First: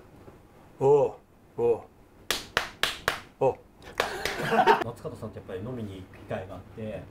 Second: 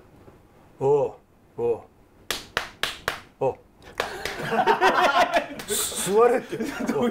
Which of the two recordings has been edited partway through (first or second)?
first